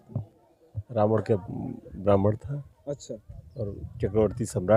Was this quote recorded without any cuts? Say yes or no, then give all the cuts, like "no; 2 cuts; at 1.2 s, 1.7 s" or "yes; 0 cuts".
yes; 0 cuts